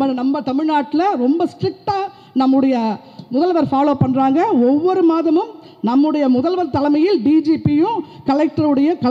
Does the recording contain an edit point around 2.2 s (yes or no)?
no